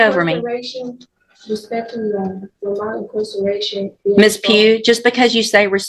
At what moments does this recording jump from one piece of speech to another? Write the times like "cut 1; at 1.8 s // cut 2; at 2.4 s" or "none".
none

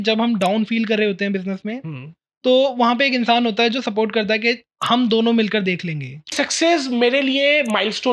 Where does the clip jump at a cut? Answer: cut 1; at 6.3 s

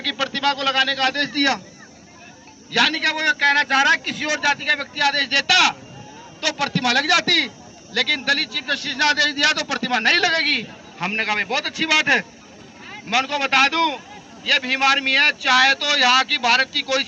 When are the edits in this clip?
none

